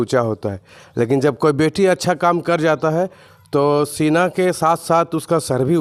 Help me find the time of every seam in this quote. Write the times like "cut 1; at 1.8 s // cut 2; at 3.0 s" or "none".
none